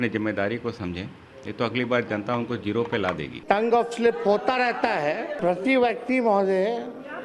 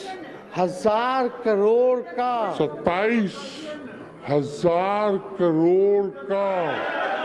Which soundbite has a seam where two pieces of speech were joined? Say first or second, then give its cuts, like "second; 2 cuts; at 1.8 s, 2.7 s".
first; 2 cuts; at 3.3 s, 5.3 s